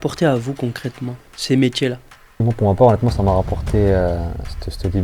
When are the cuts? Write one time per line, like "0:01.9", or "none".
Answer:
0:02.4

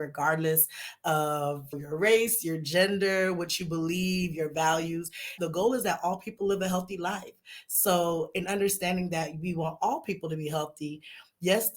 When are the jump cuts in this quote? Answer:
0:05.3

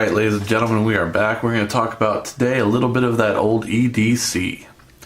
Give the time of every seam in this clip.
none

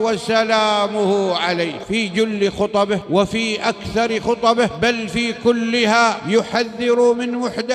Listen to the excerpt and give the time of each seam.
0:01.8
0:03.0
0:04.7
0:06.2

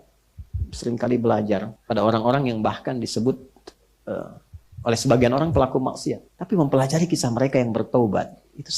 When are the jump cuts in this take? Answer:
0:01.7
0:06.3

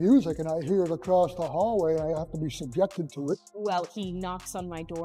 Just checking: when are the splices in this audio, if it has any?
0:03.5

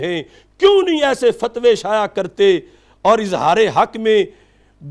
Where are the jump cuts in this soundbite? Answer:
none

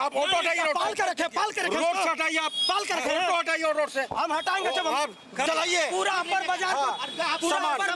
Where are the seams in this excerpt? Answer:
0:05.5

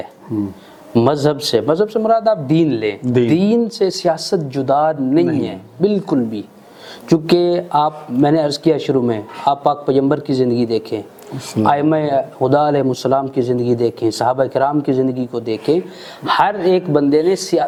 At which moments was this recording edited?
none

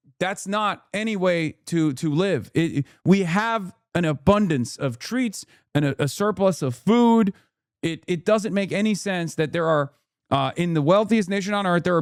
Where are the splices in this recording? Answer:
none

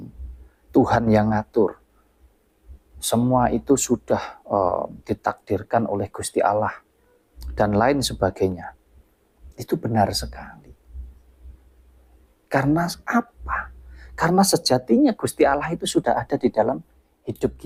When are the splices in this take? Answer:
none

